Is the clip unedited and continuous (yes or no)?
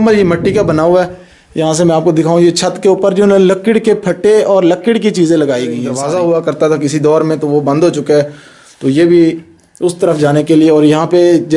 no